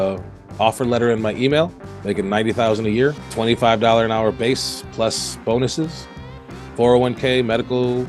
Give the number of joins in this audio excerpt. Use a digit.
1